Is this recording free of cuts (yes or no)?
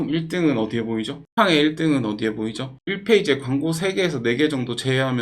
no